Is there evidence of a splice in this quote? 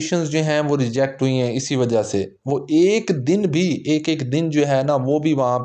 no; 0 cuts

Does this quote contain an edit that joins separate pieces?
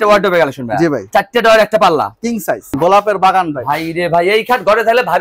yes; 2 cuts; at 1.0 s, 2.7 s

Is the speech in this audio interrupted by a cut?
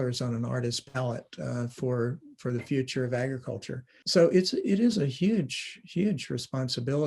yes; 1 cut; at 3.9 s

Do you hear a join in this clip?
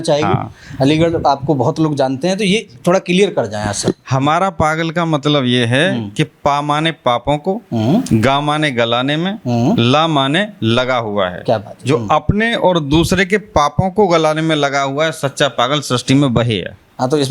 no; 0 cuts

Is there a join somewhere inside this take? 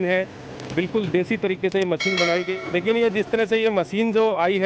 yes; 1 cut; at 2.5 s

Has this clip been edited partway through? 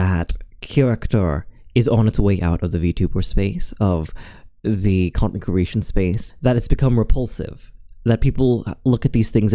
yes; 1 cut; at 6.3 s

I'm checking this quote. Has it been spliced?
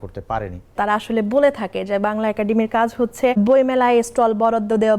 yes; 2 cuts; at 0.8 s, 3.4 s

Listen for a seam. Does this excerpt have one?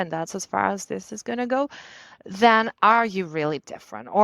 no; 0 cuts

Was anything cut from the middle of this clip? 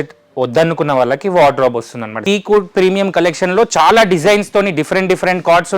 yes; 1 cut; at 2.2 s

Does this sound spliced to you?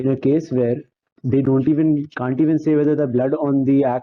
no; 0 cuts

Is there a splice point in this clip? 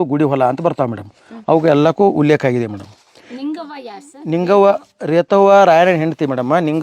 no; 0 cuts

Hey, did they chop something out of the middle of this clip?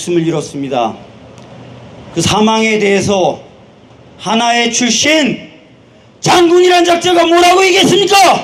no; 0 cuts

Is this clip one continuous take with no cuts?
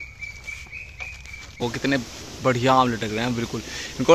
no; 1 cut; at 1.6 s

